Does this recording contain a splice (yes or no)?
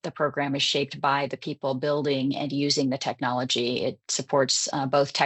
no